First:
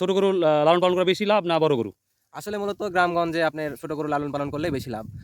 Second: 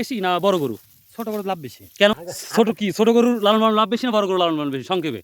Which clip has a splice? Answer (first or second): second